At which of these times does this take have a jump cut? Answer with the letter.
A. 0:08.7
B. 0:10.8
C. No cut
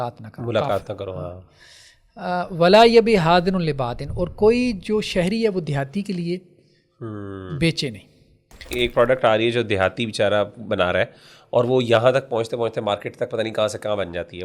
A